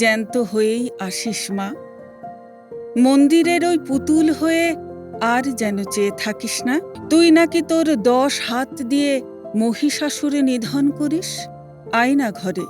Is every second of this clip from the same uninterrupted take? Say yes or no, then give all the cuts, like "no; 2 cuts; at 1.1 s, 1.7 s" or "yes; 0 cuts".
no; 1 cut; at 7.0 s